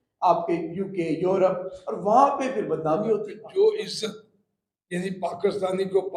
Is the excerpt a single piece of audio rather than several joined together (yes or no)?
no